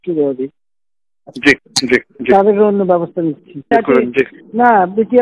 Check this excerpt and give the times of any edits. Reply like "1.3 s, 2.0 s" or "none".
3.7 s